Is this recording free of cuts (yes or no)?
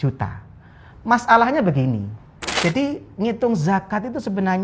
no